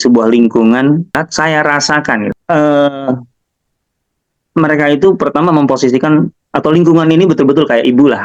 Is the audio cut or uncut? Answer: cut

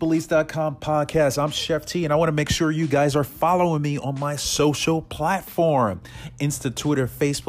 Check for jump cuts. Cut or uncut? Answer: uncut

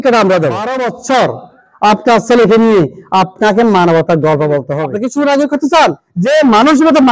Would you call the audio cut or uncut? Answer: cut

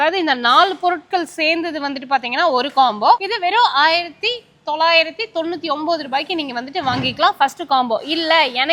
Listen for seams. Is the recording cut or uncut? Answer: uncut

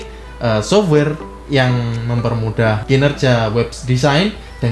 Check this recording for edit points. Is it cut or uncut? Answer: cut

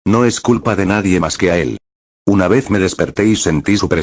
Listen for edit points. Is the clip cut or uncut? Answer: uncut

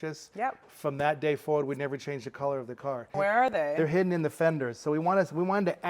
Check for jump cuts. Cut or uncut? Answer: cut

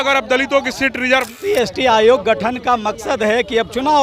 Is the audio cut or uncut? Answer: cut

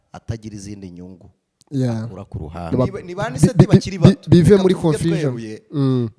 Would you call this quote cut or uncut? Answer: cut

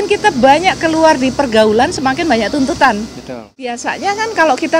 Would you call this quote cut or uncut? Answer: cut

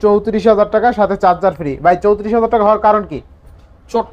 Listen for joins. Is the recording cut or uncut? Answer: uncut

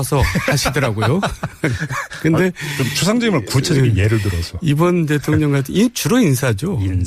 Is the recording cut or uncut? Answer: cut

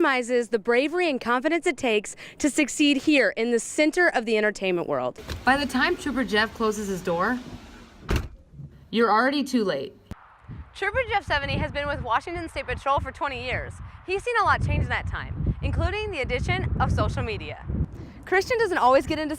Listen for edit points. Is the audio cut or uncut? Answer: cut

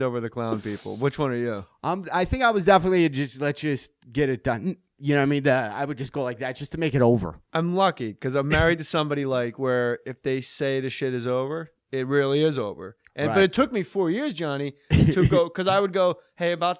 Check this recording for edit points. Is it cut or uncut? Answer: cut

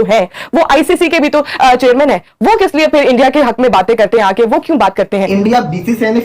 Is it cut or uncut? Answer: uncut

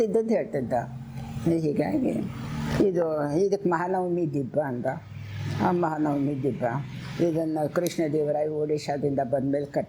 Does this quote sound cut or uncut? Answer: uncut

